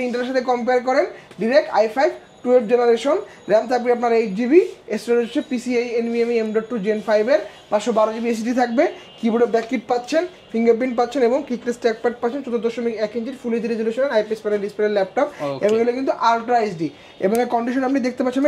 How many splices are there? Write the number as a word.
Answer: zero